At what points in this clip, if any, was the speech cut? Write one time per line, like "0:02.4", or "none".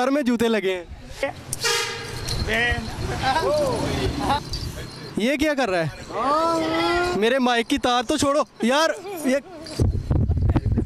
0:01.2
0:04.4